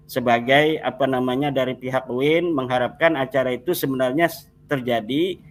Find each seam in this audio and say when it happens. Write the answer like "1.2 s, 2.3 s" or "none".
none